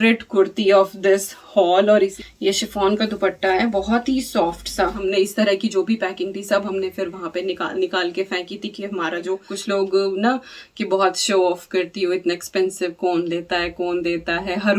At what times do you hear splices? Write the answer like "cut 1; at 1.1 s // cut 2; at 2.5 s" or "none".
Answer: cut 1; at 2.2 s // cut 2; at 5.0 s // cut 3; at 9.5 s